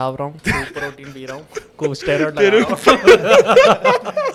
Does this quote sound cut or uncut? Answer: uncut